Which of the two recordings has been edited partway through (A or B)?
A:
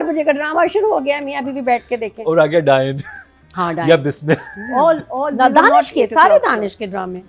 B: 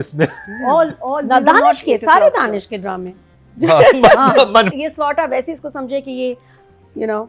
B